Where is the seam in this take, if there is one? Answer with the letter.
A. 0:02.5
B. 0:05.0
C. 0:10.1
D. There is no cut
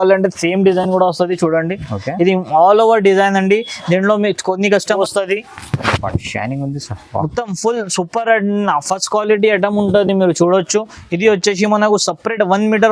B